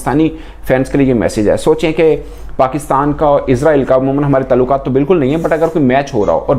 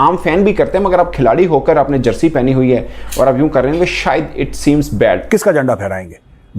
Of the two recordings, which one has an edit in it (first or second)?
second